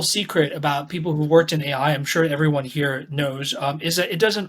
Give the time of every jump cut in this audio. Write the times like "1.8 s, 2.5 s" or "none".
none